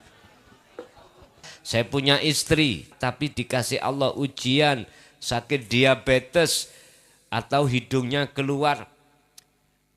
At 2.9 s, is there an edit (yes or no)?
yes